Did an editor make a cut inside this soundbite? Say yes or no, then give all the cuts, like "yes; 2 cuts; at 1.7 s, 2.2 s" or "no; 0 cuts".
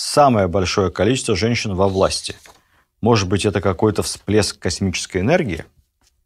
no; 0 cuts